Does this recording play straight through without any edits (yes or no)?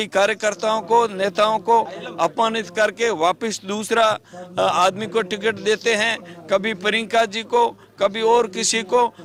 yes